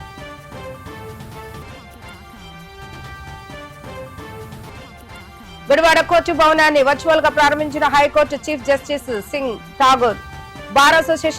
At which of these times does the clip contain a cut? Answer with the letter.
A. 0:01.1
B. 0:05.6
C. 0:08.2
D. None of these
A